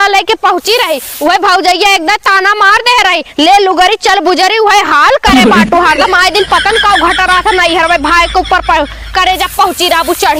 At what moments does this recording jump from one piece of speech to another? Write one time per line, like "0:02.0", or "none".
none